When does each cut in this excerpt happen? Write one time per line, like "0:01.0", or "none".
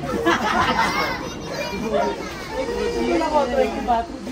none